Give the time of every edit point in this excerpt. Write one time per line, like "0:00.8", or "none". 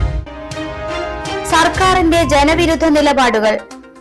0:01.4

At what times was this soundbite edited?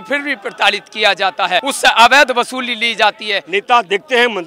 0:01.6
0:03.3

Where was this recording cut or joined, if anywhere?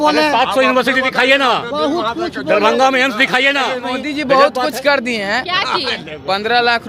0:03.8
0:05.5

